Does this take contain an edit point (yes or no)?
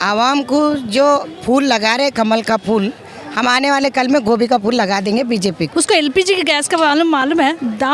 yes